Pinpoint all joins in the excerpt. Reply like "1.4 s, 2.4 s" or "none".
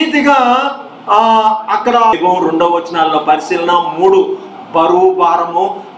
2.2 s